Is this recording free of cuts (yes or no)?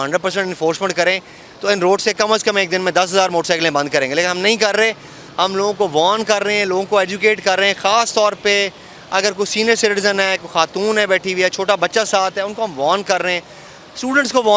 yes